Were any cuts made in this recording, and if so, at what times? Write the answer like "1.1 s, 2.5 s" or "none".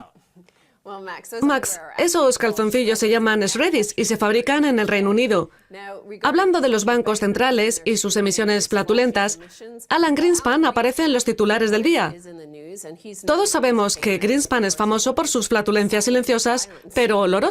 6.5 s